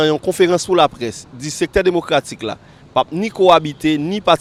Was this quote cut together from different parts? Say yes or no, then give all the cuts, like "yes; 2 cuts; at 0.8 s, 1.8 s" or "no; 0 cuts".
no; 0 cuts